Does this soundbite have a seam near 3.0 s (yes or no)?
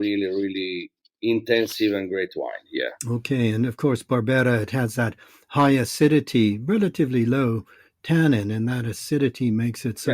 yes